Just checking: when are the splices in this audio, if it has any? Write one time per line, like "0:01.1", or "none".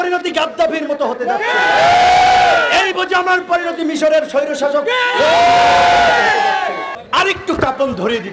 0:06.9